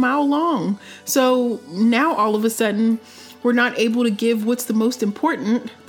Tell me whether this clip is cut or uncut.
uncut